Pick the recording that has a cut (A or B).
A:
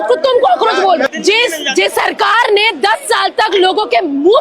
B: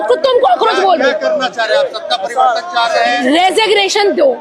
A